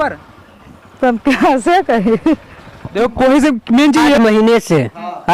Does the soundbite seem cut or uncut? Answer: cut